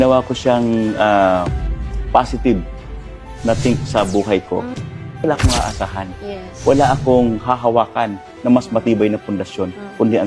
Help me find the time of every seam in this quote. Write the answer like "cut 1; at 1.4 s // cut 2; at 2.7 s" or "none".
cut 1; at 5.2 s